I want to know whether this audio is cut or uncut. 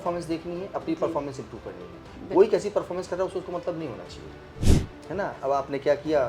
cut